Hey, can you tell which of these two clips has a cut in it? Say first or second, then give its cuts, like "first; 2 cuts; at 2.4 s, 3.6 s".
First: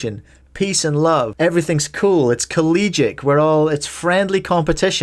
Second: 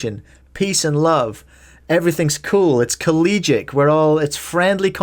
first; 1 cut; at 1.3 s